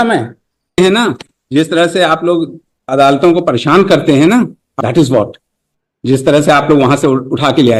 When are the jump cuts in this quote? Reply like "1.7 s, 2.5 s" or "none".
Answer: 0.8 s, 4.7 s

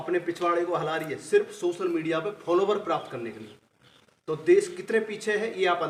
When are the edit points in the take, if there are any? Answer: none

